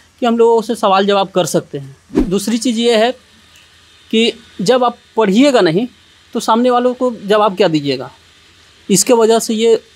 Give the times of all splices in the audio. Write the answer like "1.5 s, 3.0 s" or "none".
2.2 s